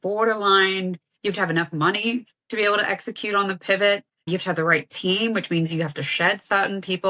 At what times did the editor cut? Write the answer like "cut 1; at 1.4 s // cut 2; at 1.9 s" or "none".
none